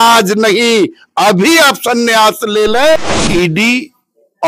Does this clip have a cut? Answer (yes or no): yes